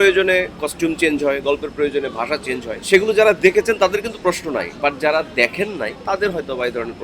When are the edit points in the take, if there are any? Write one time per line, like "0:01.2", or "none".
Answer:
0:02.7
0:04.7
0:06.0